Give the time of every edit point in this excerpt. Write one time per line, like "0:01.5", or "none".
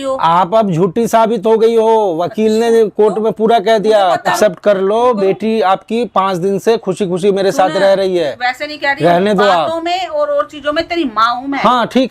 0:04.3